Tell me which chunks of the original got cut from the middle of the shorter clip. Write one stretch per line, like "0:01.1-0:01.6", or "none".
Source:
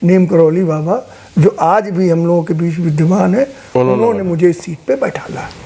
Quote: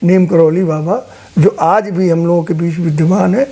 none